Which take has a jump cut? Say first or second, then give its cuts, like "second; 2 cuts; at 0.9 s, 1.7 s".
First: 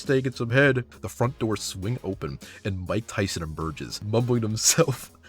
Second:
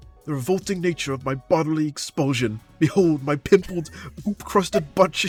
first; 2 cuts; at 1.0 s, 4.0 s